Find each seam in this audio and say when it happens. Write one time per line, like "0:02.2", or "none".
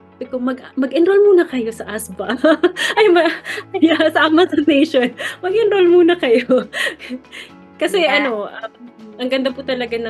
none